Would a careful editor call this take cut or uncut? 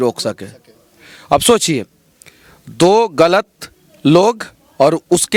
uncut